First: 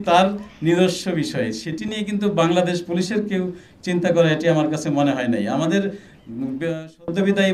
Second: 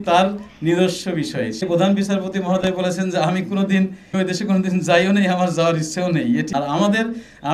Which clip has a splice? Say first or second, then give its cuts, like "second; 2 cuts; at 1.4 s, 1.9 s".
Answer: second; 3 cuts; at 1.6 s, 4.1 s, 6.5 s